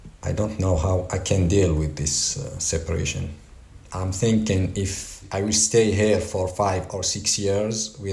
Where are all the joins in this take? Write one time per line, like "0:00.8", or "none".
0:03.9
0:05.2

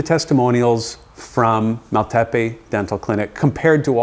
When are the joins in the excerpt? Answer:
none

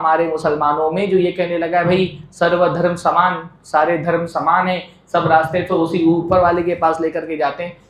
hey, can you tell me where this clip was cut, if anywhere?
none

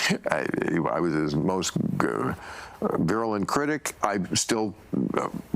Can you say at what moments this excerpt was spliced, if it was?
0:03.9

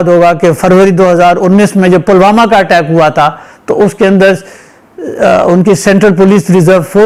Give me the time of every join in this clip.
none

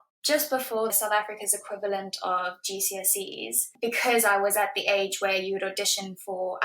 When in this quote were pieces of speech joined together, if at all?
0:00.9

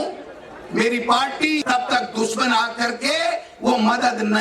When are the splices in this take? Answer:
0:01.6

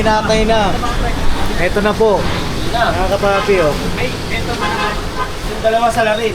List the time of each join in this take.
none

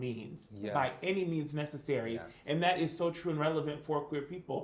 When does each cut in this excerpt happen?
none

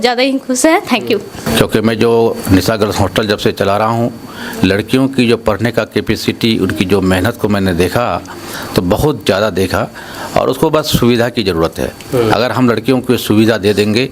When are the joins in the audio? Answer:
0:01.4

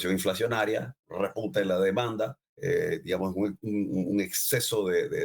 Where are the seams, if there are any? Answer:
0:02.5

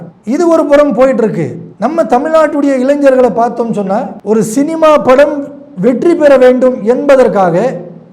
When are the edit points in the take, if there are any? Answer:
0:04.2

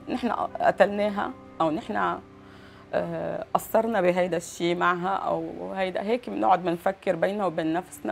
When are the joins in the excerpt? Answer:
none

